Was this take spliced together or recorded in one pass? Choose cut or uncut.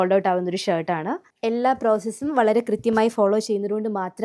cut